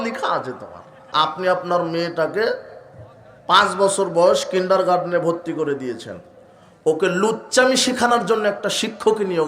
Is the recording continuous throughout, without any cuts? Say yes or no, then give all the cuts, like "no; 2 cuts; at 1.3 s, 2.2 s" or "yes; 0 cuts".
no; 1 cut; at 1.1 s